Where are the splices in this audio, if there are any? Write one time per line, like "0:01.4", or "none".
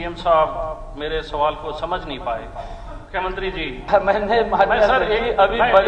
0:03.0